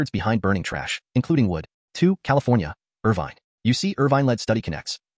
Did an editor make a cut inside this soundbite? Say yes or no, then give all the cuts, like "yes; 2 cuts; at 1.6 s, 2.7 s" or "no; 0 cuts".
yes; 1 cut; at 1.7 s